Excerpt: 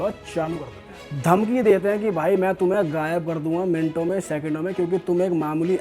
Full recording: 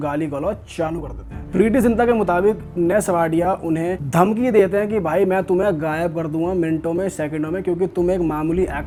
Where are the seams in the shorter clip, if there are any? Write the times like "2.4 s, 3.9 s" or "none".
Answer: 1.1 s